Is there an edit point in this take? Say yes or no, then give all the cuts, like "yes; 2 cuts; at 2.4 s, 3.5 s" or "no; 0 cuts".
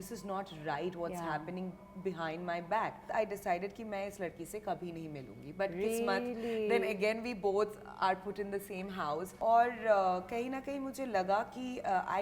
yes; 2 cuts; at 3.1 s, 9.3 s